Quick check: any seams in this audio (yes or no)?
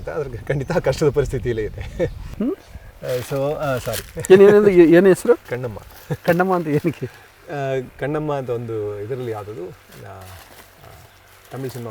yes